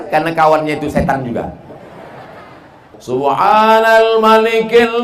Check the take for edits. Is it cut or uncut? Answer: cut